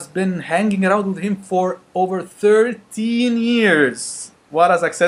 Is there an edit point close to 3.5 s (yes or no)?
yes